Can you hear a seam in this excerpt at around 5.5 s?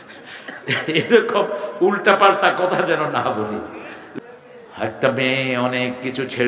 no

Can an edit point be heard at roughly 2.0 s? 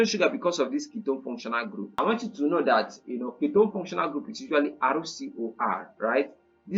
yes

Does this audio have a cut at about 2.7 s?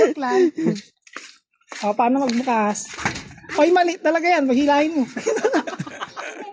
no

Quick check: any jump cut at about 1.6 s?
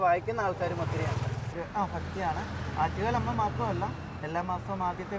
yes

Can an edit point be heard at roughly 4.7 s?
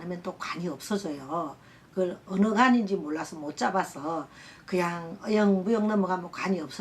no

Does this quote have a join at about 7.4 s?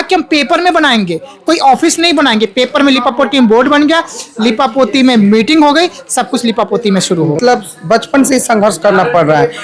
yes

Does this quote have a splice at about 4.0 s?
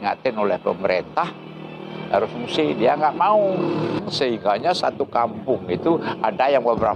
yes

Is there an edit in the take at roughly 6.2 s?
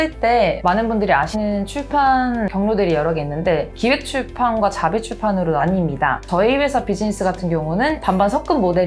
yes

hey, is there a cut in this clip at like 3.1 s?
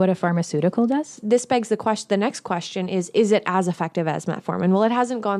no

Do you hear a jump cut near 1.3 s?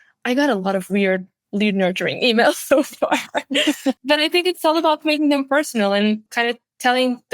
no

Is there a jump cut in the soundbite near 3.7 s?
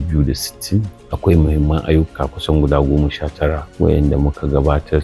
yes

